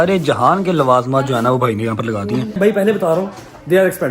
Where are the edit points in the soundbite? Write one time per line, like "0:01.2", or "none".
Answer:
0:02.6